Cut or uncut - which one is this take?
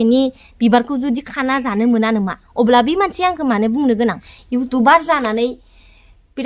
cut